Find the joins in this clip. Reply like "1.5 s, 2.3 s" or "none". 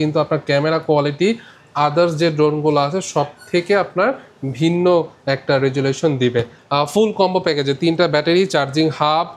6.6 s